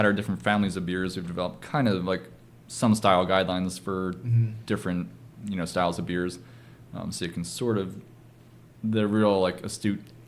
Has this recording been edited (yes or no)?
no